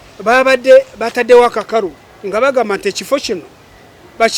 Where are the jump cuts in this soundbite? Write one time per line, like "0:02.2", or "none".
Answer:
none

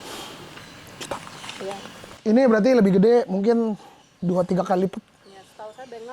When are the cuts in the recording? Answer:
none

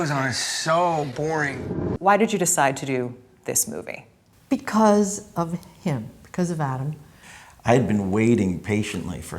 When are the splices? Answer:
0:01.9
0:07.2

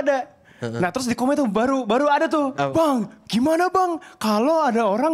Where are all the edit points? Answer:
0:02.5

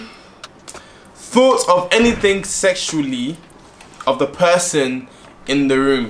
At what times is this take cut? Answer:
none

